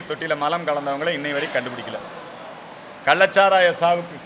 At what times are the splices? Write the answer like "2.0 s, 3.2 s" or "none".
none